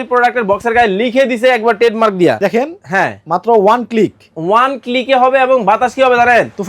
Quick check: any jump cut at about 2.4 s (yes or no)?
yes